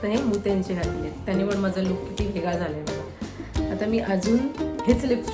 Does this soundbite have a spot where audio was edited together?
no; 0 cuts

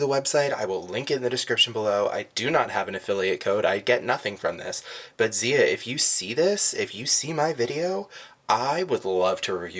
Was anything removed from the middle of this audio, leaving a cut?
no; 0 cuts

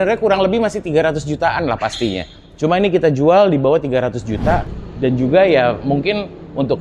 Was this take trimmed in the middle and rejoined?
yes; 1 cut; at 4.7 s

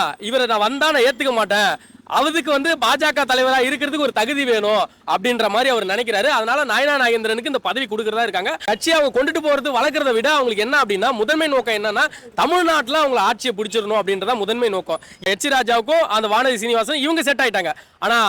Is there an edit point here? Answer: yes; 2 cuts; at 8.6 s, 15.2 s

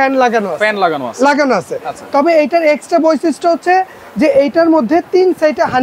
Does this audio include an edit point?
no; 0 cuts

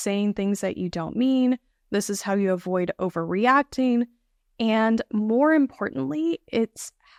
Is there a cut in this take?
no; 0 cuts

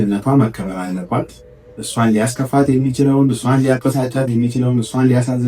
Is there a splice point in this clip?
no; 0 cuts

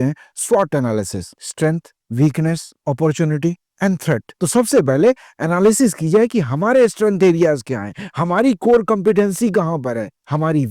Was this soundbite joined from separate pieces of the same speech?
no; 0 cuts

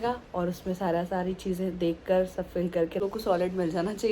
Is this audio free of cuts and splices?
no; 1 cut; at 3.0 s

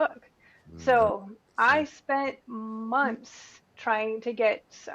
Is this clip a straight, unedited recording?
yes; 0 cuts

